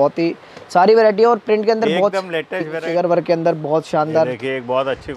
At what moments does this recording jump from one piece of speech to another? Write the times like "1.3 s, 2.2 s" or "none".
2.8 s